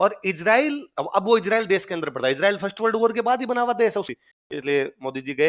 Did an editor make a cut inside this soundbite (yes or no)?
yes